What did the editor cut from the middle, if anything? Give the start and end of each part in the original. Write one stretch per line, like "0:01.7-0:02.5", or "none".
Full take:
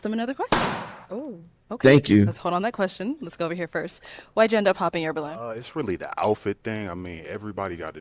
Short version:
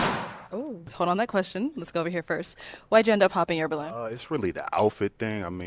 0:01.5-0:02.4